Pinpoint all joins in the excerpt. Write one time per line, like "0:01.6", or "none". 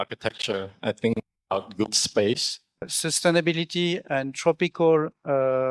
0:02.9